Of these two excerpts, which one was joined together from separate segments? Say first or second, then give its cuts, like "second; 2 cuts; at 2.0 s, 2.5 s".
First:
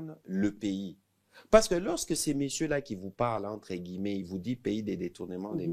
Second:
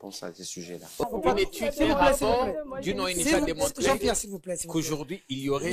second; 1 cut; at 1.0 s